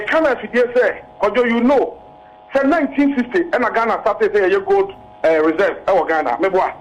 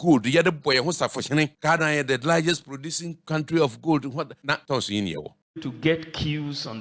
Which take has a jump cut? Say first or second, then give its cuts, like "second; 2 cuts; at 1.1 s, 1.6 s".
second; 4 cuts; at 1.6 s, 3.2 s, 4.5 s, 5.4 s